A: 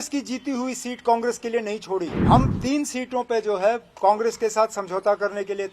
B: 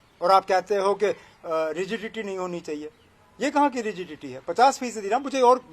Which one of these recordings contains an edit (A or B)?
A